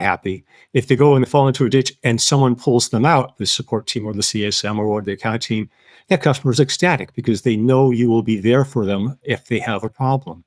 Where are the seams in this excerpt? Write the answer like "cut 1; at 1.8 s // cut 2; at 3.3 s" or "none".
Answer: none